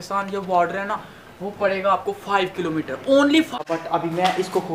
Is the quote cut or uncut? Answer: cut